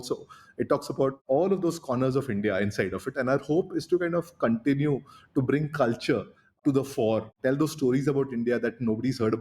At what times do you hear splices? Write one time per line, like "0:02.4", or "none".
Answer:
0:01.2